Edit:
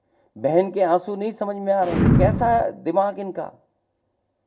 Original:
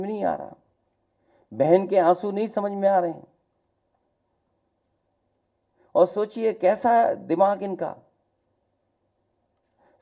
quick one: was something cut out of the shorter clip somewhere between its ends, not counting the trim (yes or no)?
yes